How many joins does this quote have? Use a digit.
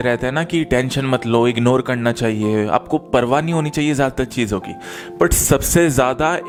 0